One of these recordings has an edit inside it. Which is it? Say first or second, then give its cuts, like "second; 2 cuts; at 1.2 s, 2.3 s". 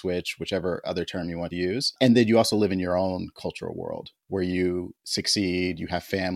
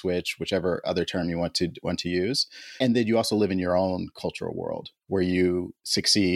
first; 1 cut; at 1.7 s